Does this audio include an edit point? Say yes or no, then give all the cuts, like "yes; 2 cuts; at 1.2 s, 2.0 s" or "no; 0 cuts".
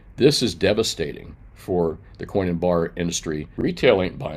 yes; 1 cut; at 3.5 s